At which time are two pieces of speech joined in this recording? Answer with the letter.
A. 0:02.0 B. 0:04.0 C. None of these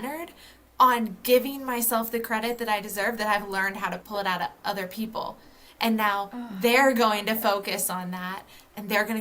B